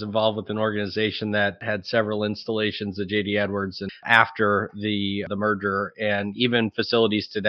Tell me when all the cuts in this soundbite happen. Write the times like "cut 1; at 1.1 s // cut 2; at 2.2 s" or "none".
cut 1; at 1.6 s // cut 2; at 4.0 s // cut 3; at 5.3 s